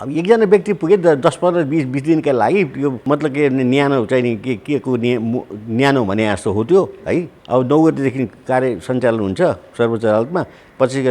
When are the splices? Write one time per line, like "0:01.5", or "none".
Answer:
0:03.0
0:07.4